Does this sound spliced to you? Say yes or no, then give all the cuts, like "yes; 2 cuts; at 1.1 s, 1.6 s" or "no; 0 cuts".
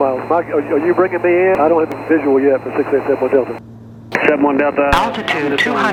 no; 0 cuts